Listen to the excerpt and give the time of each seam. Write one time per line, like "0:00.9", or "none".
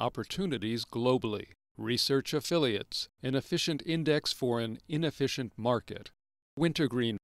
none